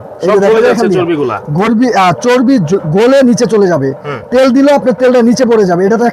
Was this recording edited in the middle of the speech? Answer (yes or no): no